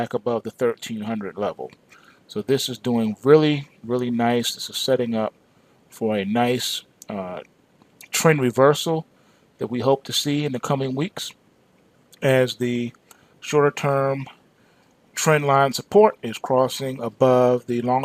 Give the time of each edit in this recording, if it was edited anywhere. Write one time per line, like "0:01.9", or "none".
0:02.6
0:16.7